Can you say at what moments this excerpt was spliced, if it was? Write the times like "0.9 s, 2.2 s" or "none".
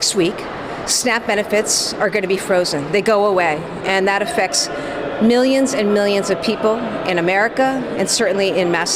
none